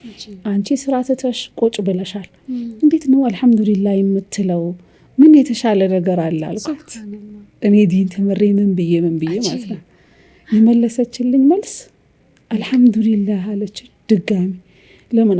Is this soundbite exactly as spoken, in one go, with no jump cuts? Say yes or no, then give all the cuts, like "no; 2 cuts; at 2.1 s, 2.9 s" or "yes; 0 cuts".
yes; 0 cuts